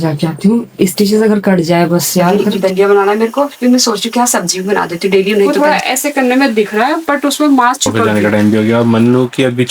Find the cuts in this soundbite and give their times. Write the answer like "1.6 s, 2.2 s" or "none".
2.4 s, 5.5 s, 8.0 s